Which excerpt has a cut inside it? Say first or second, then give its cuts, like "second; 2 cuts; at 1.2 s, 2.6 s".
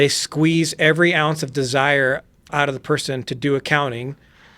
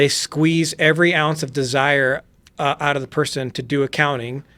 first; 1 cut; at 2.5 s